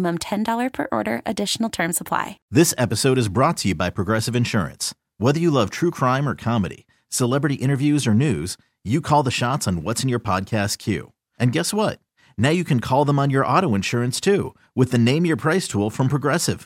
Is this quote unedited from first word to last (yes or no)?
no